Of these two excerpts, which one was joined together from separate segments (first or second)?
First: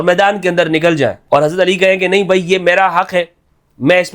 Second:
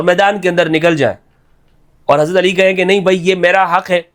first